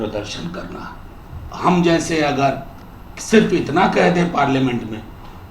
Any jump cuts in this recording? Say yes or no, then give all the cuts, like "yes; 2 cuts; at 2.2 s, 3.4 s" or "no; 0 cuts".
yes; 1 cut; at 1.4 s